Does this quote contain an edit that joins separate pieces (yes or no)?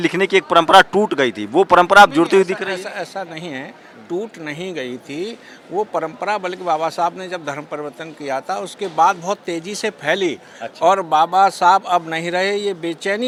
no